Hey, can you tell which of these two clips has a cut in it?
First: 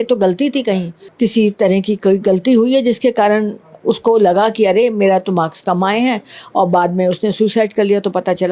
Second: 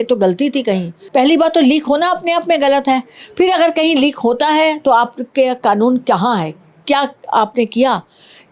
second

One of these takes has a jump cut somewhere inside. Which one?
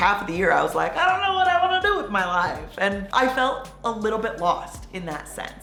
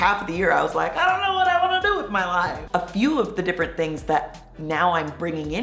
second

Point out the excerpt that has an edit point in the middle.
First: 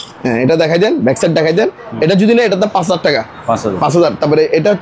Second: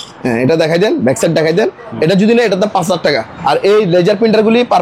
second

